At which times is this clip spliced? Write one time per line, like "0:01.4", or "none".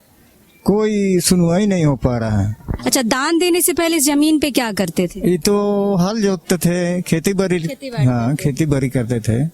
0:02.7